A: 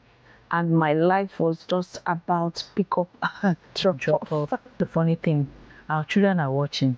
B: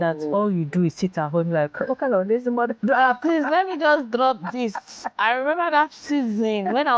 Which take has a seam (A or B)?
A